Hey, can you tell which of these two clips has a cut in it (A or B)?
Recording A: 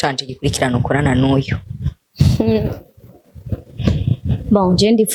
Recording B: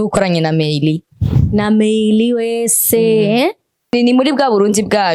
B